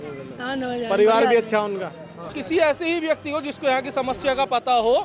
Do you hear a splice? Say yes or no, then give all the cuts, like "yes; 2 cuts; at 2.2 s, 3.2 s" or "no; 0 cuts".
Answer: yes; 1 cut; at 2.4 s